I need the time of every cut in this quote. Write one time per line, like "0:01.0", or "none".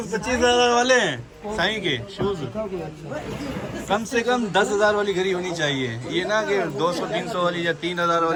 none